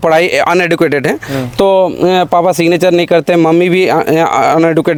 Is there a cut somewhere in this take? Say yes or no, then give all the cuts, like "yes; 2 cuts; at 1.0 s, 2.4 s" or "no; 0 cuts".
no; 0 cuts